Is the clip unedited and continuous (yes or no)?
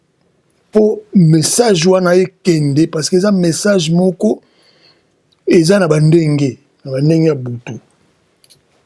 yes